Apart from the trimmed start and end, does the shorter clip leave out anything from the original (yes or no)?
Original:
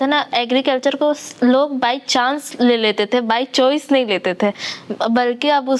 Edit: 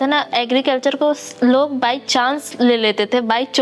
no